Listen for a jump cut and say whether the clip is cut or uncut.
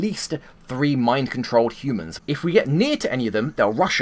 cut